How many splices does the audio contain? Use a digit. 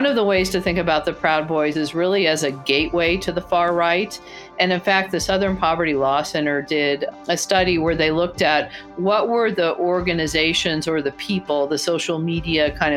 0